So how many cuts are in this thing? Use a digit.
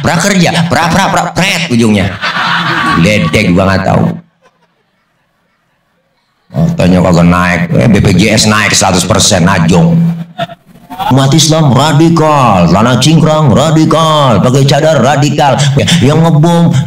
2